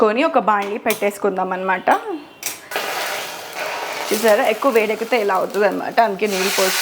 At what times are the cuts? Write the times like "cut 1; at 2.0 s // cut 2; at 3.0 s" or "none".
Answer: cut 1; at 2.7 s

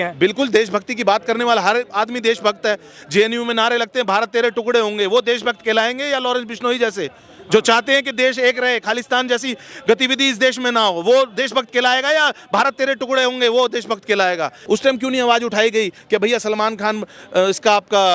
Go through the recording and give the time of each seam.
cut 1; at 14.7 s

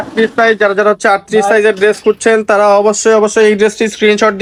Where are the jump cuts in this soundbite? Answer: none

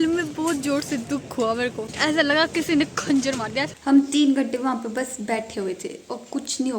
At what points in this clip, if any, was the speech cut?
cut 1; at 1.9 s // cut 2; at 3.7 s

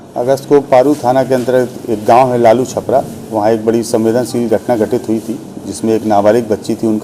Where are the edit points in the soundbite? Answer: none

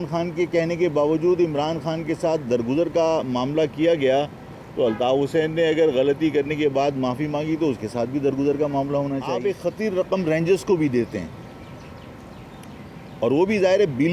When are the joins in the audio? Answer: cut 1; at 9.4 s

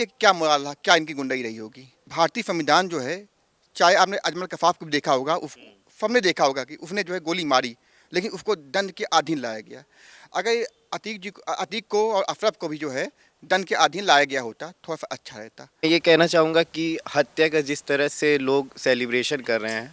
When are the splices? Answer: cut 1; at 2.0 s // cut 2; at 15.8 s

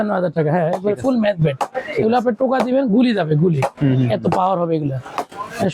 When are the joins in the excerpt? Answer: none

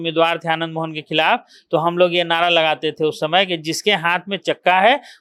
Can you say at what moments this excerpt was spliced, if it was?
none

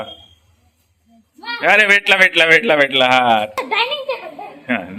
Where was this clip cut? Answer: cut 1; at 3.5 s

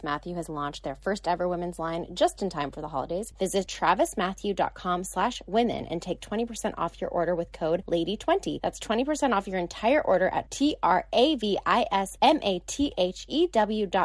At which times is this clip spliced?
cut 1; at 3.6 s // cut 2; at 7.8 s // cut 3; at 8.6 s // cut 4; at 12.1 s

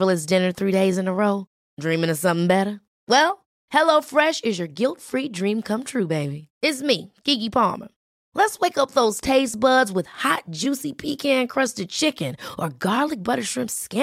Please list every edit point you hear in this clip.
none

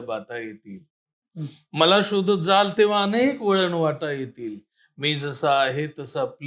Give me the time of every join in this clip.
none

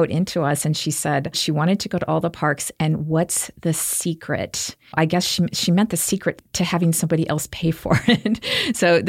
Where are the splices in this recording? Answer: cut 1; at 1.3 s

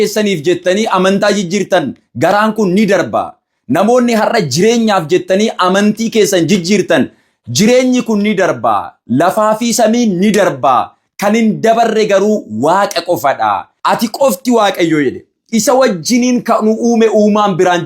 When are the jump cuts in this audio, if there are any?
cut 1; at 13.7 s

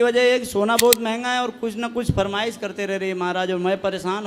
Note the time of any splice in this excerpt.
none

